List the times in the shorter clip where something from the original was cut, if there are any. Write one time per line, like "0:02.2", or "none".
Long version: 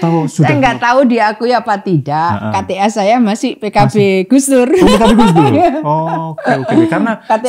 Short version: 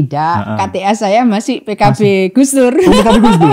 none